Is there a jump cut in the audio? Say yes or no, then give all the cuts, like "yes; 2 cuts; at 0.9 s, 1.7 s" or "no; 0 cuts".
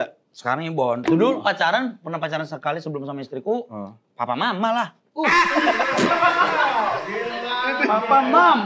no; 0 cuts